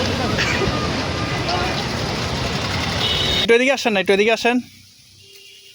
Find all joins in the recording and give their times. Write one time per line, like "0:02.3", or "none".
0:03.5